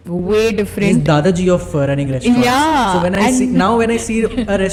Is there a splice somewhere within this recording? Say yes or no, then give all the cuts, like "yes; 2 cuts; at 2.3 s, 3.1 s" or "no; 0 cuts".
no; 0 cuts